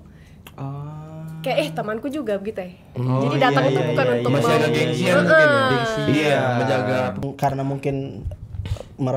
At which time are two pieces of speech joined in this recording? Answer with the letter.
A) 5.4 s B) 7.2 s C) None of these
B